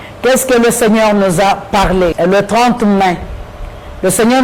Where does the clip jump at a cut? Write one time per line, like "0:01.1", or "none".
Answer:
0:02.1

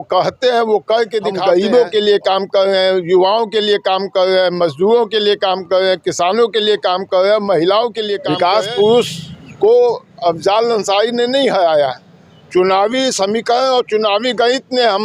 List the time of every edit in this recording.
0:01.3
0:08.2

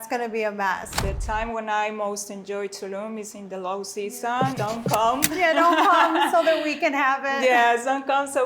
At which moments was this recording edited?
0:00.9
0:04.5

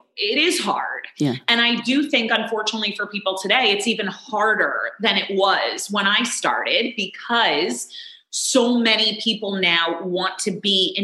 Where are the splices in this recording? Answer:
none

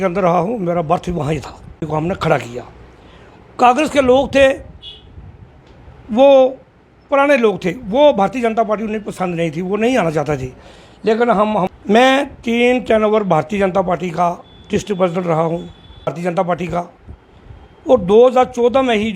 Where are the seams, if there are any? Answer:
0:01.8
0:11.7
0:16.2

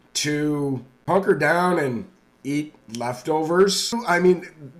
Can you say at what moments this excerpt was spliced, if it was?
0:00.9
0:04.0

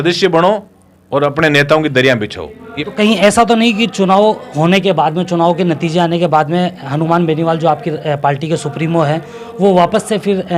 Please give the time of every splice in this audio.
0:02.8

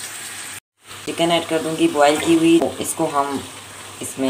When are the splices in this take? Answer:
0:01.1
0:02.6

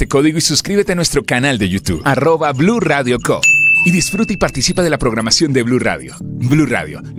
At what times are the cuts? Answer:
none

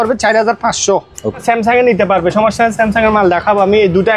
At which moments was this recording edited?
0:01.3

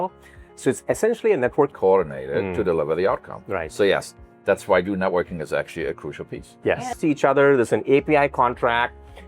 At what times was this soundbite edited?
0:01.7
0:06.9

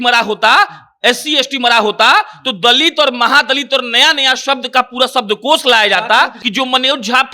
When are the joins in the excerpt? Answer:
0:06.3

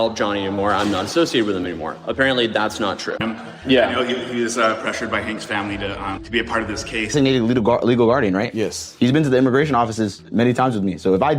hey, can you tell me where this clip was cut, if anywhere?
0:03.2
0:07.1

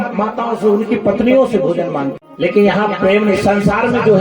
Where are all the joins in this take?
0:02.2

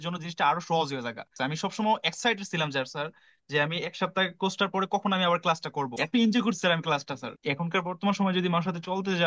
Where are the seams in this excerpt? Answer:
0:01.3
0:06.0
0:07.3

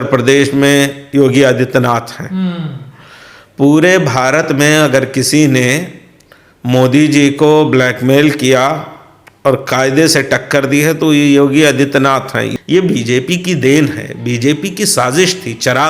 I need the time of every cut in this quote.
0:12.5

